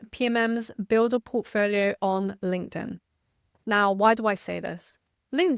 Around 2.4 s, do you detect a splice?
no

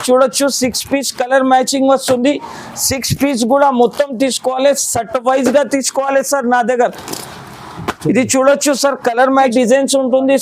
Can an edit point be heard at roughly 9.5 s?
yes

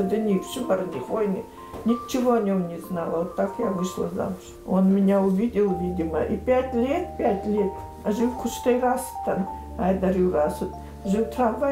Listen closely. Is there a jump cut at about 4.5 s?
yes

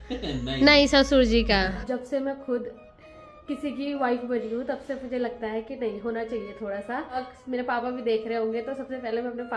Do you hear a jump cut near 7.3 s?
yes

